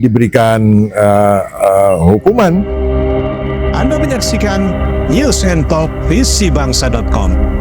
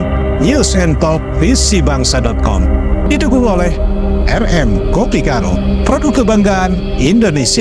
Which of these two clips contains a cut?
first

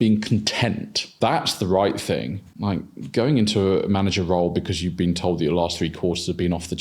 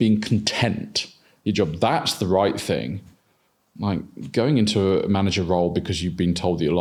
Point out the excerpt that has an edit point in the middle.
first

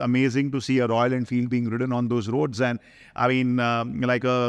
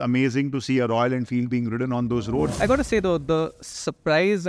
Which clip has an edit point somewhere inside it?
second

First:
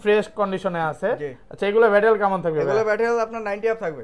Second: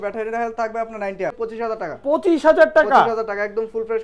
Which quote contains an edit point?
second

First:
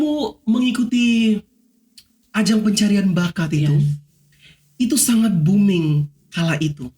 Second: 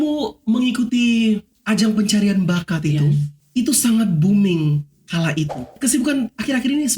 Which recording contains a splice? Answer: second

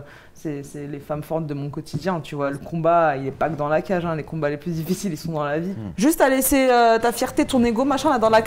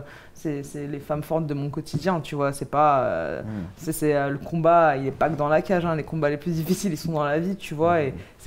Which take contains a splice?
first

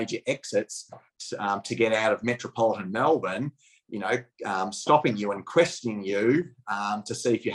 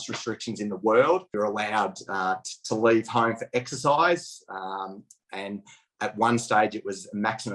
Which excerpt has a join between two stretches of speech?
second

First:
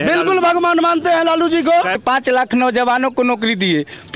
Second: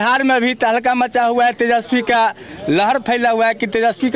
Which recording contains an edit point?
first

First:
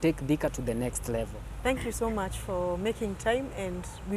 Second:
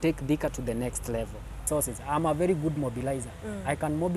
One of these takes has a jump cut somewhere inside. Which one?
second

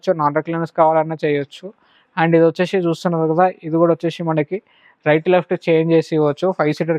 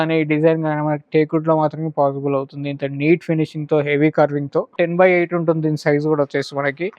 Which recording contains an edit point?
second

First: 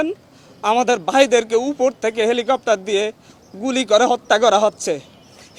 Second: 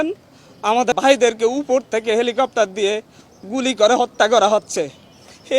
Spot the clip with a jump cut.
second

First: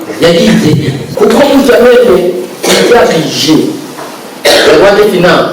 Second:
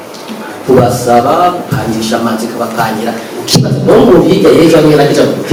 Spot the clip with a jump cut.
first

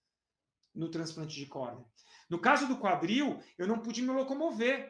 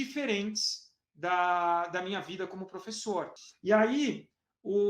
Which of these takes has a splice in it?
second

